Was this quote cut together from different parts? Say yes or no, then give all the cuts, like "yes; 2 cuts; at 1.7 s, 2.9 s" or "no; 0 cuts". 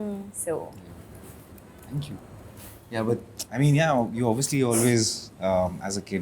no; 0 cuts